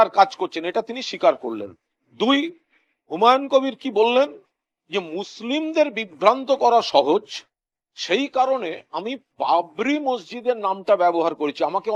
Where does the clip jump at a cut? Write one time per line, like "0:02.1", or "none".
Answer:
none